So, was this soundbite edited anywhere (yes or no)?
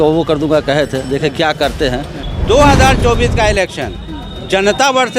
yes